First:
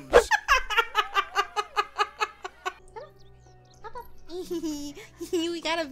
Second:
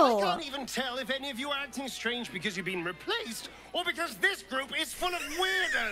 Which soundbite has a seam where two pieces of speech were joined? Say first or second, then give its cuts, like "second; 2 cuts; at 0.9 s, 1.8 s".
first; 1 cut; at 2.8 s